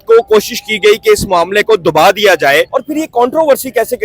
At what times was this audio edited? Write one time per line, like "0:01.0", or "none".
0:02.7